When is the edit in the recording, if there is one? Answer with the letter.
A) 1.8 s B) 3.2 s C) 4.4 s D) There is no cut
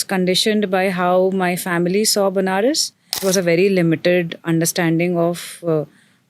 B